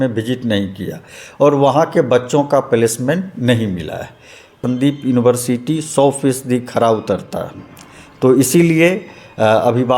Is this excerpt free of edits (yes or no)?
no